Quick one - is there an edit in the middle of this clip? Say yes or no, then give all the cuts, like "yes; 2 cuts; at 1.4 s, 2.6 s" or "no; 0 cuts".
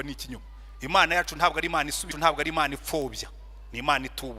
yes; 1 cut; at 2.1 s